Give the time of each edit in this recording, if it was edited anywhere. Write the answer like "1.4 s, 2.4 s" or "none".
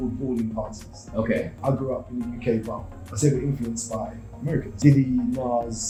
none